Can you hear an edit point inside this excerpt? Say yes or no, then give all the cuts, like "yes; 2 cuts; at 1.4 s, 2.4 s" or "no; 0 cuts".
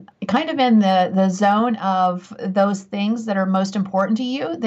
no; 0 cuts